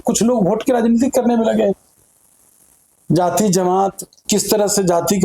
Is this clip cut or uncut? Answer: uncut